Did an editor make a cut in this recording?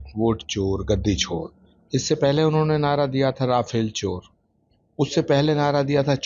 no; 0 cuts

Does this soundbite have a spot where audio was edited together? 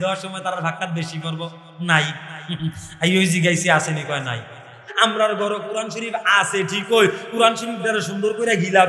yes; 1 cut; at 4.9 s

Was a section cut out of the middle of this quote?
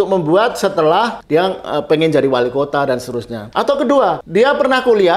yes; 3 cuts; at 1.2 s, 3.3 s, 4.2 s

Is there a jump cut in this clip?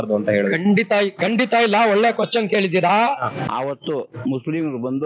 yes; 1 cut; at 3.4 s

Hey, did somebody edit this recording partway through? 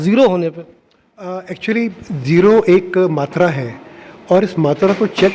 no; 0 cuts

